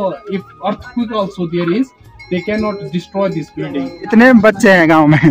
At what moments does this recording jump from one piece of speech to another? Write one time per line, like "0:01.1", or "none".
0:04.1